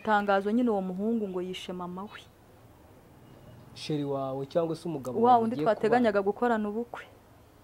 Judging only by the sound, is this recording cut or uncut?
uncut